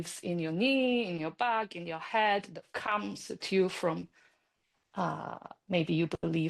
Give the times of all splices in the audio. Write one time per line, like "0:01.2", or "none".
none